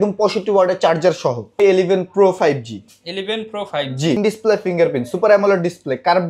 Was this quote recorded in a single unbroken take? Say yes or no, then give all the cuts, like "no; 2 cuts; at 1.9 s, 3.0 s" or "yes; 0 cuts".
no; 2 cuts; at 1.6 s, 4.2 s